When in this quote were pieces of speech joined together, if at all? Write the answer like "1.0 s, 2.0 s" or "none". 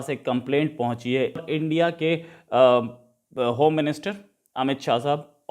1.4 s